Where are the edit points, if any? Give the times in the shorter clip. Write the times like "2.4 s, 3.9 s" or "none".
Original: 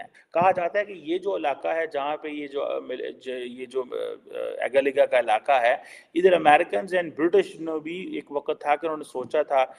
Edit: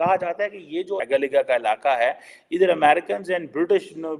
1.0 s

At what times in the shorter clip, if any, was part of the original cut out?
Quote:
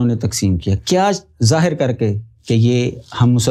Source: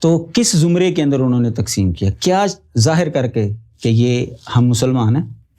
none

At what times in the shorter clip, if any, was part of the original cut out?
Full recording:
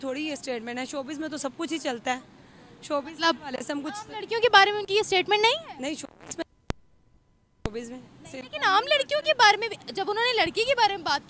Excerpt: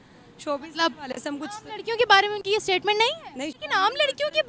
3.6 s

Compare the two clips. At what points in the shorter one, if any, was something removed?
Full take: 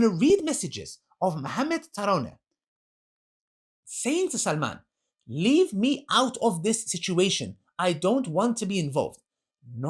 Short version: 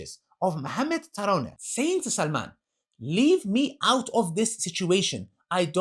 1.6 s

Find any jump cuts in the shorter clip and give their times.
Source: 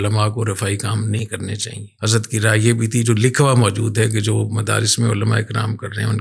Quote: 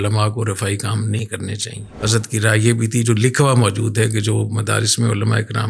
none

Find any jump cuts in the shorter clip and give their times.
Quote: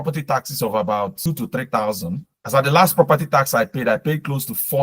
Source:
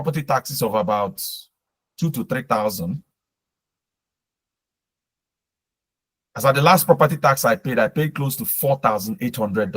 1.2 s, 2.3 s

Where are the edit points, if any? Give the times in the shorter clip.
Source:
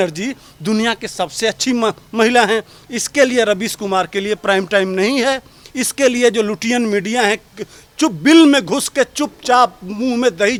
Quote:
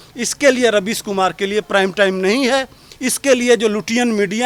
none

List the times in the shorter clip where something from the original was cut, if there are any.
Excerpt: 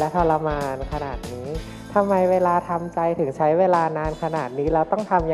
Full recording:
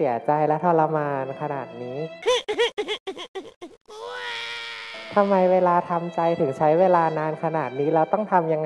1.7 s

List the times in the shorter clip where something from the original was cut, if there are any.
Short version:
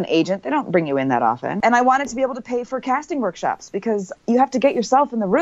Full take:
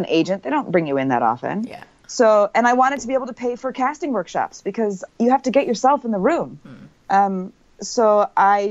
1.6 s

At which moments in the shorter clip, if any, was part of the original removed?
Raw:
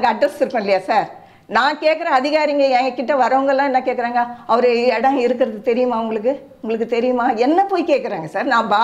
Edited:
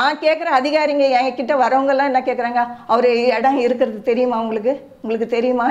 none

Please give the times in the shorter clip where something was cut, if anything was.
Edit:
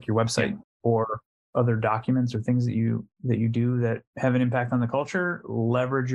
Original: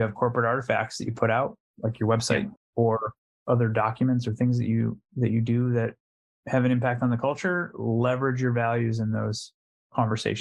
4.1 s

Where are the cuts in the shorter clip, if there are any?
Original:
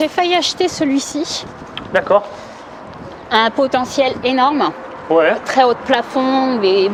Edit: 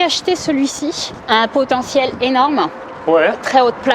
1.1 s

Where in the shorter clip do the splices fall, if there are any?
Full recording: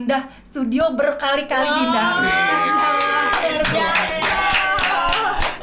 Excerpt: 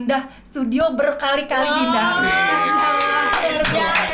none

